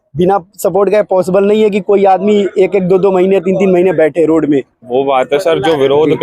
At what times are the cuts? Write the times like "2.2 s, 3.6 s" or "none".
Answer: 4.8 s

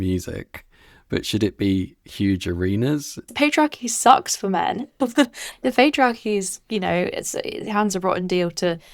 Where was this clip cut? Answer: 3.3 s, 5.4 s

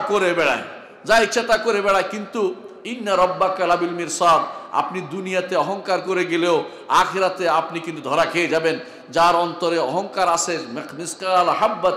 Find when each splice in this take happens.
none

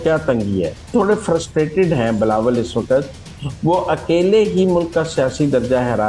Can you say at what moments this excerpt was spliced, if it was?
0.9 s

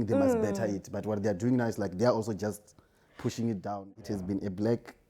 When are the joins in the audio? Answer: 3.7 s

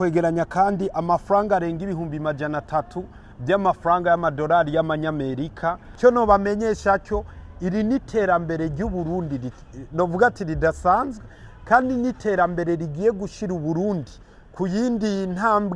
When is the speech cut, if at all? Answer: 5.9 s

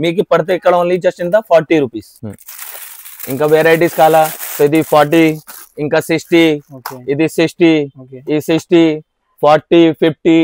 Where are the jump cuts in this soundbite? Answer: 2.1 s

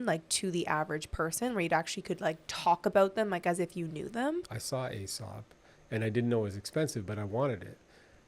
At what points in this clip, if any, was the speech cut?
4.4 s

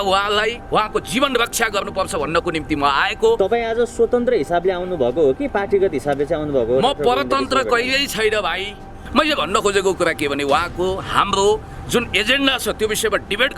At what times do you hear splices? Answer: 9.0 s

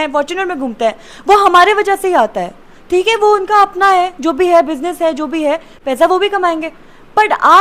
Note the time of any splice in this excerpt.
none

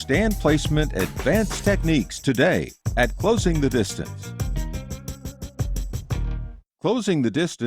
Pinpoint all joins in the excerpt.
6.5 s

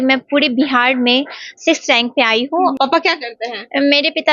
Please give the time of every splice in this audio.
2.7 s

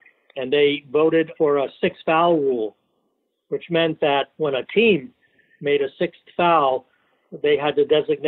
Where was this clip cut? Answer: 1.3 s, 4.3 s

